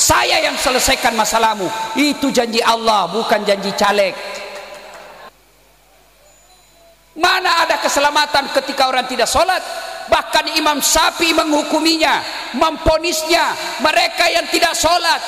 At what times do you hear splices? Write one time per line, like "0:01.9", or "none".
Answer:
0:05.3